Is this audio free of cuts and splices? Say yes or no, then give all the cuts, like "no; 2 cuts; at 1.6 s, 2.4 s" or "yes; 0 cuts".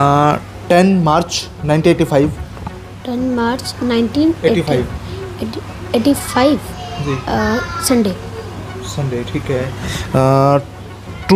yes; 0 cuts